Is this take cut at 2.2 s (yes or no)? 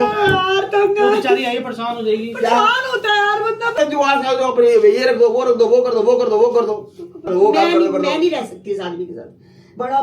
yes